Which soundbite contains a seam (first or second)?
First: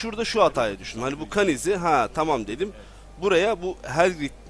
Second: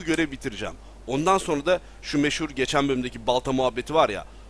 second